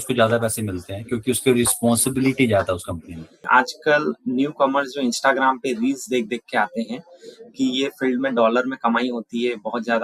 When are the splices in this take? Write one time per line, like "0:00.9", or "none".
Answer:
0:03.4